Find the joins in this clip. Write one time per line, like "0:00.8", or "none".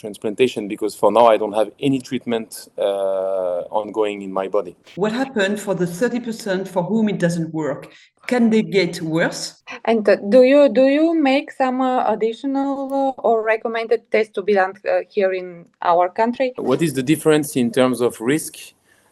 0:04.8
0:09.4
0:16.6